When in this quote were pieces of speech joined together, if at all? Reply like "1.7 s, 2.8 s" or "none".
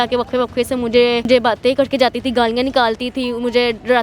1.3 s